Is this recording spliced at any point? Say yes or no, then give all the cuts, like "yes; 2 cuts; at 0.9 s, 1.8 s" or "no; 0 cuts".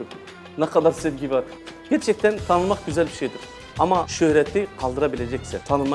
yes; 1 cut; at 1.6 s